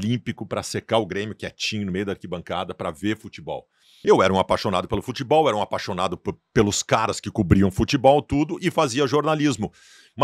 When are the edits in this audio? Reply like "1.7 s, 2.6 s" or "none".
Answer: 3.9 s